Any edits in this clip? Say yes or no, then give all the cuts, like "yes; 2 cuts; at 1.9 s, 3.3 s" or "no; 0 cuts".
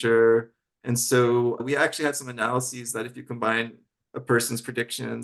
yes; 1 cut; at 1.6 s